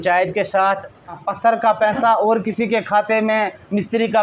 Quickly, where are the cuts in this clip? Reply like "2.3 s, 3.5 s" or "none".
1.2 s